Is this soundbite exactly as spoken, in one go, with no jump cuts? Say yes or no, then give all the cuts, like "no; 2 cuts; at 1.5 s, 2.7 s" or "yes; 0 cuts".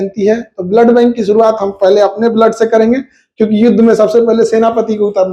yes; 0 cuts